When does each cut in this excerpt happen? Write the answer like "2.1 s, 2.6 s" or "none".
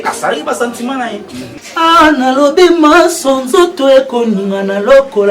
1.5 s